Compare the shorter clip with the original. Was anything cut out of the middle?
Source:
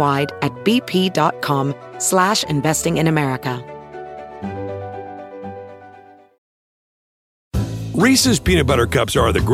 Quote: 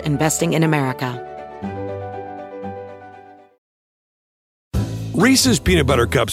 yes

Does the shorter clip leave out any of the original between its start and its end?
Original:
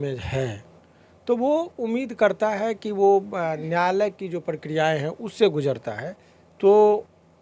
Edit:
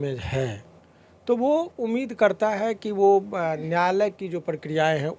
no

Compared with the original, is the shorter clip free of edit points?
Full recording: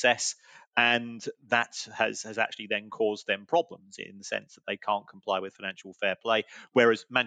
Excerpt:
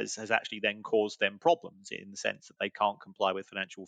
yes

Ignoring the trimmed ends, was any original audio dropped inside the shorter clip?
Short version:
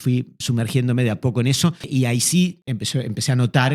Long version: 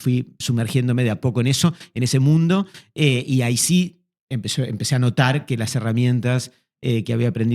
yes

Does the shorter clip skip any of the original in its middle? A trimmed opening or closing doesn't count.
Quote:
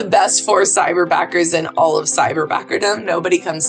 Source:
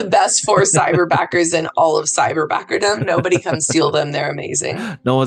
no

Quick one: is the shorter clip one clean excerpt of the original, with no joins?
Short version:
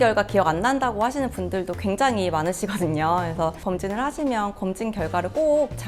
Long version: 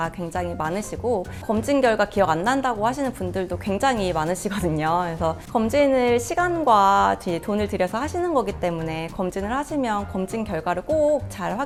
no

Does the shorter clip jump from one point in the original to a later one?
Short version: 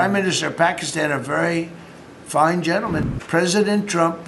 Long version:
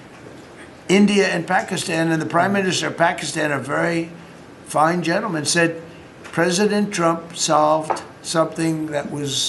yes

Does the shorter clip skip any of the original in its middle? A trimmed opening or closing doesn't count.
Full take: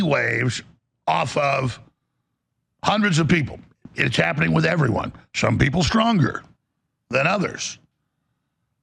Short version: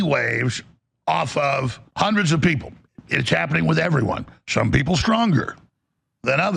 yes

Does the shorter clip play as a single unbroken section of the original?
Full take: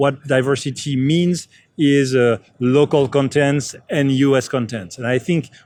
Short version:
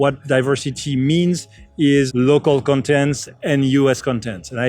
no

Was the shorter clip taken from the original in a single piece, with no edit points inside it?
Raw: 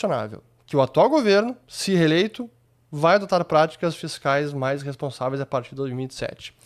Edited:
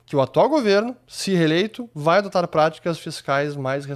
no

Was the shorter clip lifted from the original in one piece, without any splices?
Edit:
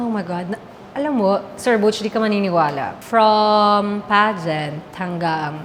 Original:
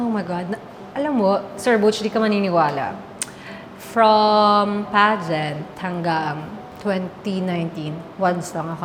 no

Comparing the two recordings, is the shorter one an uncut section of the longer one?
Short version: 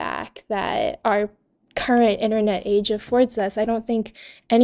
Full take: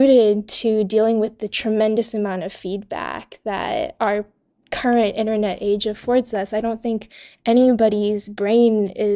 yes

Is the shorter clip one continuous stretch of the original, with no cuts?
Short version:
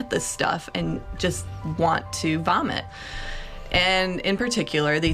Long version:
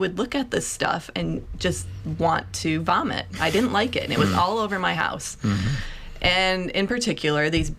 no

